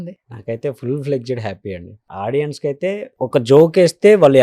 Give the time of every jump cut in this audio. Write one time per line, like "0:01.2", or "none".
0:01.9
0:03.1